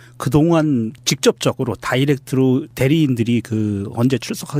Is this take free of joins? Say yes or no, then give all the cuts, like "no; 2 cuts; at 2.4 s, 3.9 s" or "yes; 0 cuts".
no; 1 cut; at 3.3 s